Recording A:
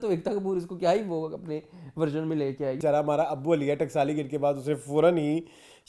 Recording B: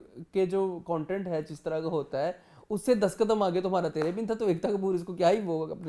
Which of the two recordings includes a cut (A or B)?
A